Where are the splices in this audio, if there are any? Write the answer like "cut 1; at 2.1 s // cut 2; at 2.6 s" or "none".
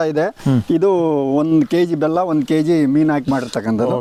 none